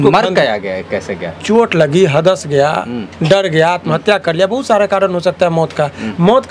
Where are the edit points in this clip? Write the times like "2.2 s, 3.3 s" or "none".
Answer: none